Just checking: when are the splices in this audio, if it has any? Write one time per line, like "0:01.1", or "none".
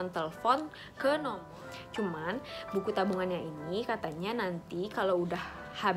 0:01.4